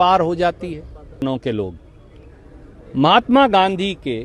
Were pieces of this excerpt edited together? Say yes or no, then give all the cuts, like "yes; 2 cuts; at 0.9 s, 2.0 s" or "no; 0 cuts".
yes; 1 cut; at 1.2 s